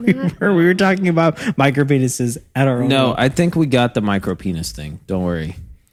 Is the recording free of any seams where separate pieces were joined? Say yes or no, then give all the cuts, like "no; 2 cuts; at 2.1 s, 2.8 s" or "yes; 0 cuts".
yes; 0 cuts